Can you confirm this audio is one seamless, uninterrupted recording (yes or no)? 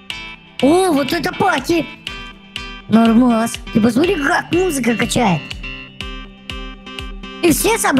yes